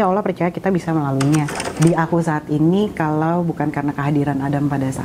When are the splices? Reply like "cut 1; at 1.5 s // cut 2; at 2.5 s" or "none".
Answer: cut 1; at 1.6 s